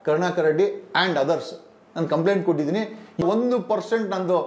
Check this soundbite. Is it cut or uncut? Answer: cut